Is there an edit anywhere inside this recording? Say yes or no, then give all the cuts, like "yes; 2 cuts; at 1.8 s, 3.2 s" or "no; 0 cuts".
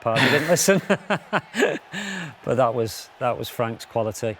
no; 0 cuts